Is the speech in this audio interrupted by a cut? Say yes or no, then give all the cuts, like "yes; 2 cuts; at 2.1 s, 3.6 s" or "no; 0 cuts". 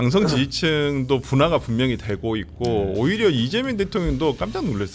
no; 0 cuts